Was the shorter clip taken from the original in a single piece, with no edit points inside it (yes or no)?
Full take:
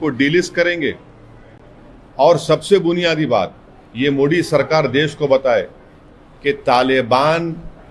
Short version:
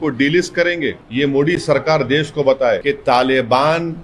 no